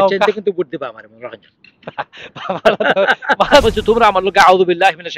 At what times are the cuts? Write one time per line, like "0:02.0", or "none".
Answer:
0:03.6

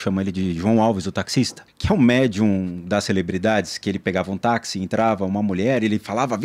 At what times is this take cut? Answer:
0:01.7

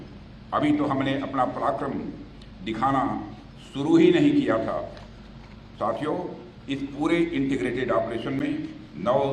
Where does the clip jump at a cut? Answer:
none

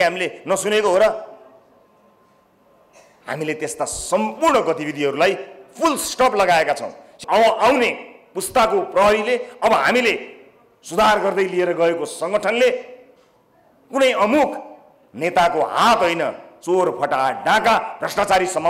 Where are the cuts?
0:07.1

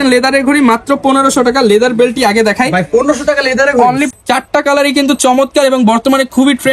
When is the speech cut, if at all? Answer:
0:04.1

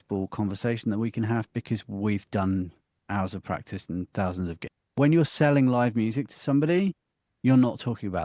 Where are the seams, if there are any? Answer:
0:04.8

